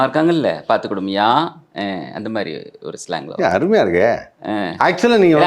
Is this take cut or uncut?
uncut